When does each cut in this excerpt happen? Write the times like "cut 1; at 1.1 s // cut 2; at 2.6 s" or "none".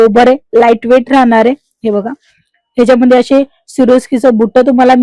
none